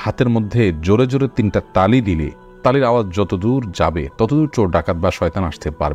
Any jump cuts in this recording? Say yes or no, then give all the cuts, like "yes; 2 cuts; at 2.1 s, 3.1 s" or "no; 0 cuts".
no; 0 cuts